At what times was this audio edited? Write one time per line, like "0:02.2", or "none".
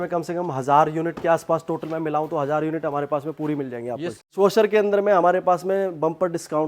0:04.1